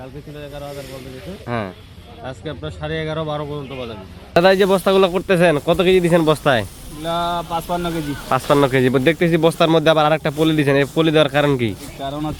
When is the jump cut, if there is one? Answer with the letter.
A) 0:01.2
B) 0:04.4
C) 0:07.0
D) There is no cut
B